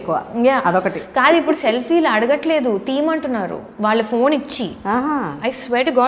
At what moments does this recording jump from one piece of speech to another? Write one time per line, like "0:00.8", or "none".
none